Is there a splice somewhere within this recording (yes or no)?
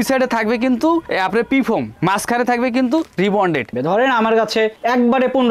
yes